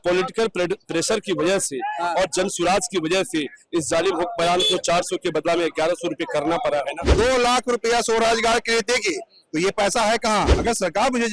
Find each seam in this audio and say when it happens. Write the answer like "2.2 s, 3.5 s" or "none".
7.0 s, 10.5 s